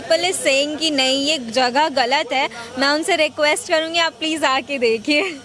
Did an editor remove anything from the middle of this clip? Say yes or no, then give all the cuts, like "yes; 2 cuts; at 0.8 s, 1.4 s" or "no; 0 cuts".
no; 0 cuts